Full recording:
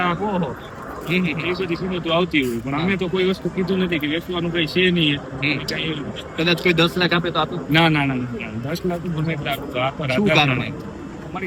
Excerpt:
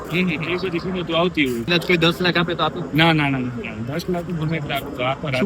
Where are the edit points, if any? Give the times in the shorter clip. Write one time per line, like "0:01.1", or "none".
0:01.7

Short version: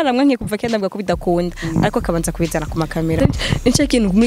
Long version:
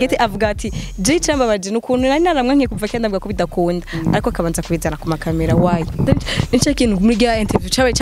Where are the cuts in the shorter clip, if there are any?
0:03.2

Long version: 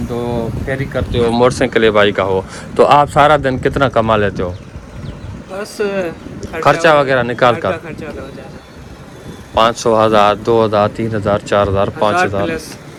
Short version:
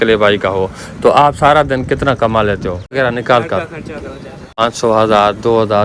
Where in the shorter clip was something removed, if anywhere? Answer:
0:02.9
0:04.6

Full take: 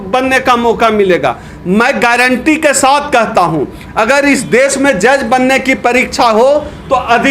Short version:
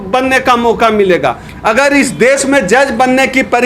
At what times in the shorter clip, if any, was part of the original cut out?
0:01.5

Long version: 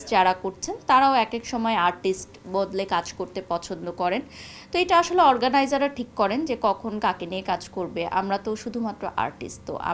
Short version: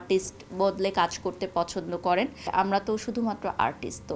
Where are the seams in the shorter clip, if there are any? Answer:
0:02.5

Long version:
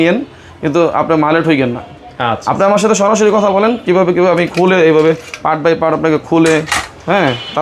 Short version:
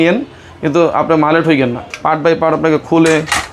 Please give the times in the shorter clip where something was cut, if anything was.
0:01.9

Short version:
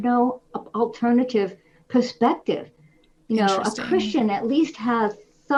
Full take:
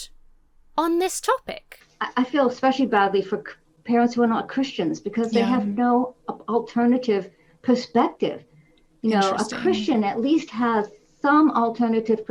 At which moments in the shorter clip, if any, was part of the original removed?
none

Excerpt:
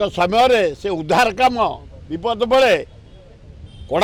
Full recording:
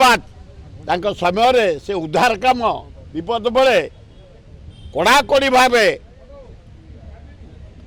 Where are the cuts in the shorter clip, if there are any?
none

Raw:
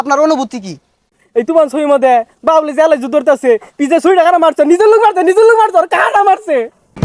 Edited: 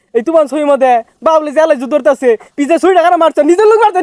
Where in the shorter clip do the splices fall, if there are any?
none

